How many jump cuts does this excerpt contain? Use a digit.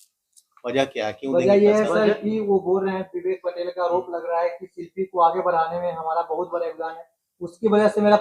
0